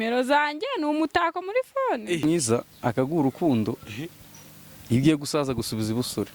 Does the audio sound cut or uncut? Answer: cut